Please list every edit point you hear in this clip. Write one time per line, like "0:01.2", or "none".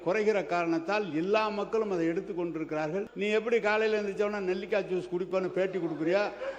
0:03.1